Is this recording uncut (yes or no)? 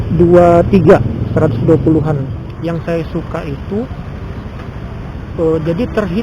no